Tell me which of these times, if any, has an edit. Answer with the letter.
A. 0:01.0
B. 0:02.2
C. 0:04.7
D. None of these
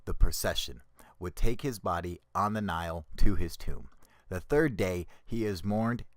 B